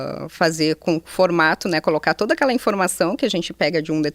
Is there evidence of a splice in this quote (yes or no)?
no